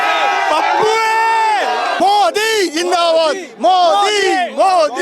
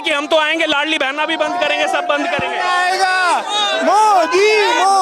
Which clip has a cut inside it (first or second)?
first